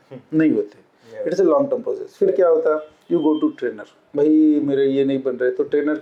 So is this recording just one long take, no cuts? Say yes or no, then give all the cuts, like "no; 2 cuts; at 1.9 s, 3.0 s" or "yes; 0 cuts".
yes; 0 cuts